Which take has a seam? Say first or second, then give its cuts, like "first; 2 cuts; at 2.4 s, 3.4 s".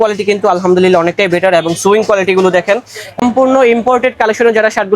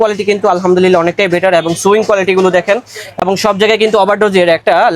first; 1 cut; at 3.2 s